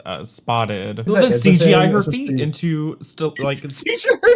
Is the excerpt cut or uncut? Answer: cut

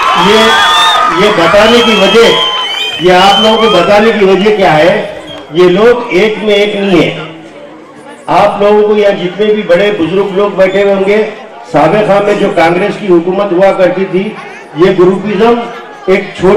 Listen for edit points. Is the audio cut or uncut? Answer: uncut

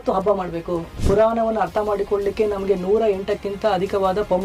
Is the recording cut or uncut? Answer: cut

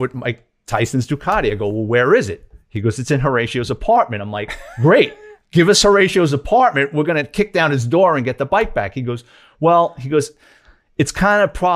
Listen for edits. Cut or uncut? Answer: uncut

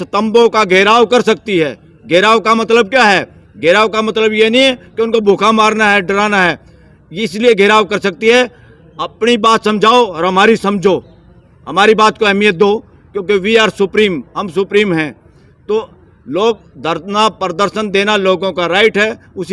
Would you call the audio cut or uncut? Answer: uncut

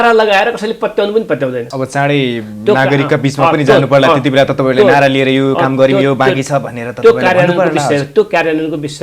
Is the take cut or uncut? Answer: cut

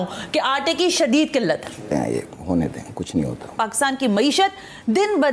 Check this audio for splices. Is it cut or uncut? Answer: cut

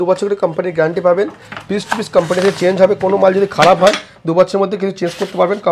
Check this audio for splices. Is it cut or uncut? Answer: uncut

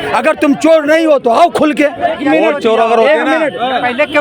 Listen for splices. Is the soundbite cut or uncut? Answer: cut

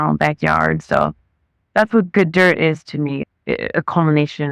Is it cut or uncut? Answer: cut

